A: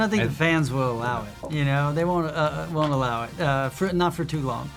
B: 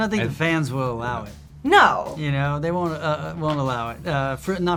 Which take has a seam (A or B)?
A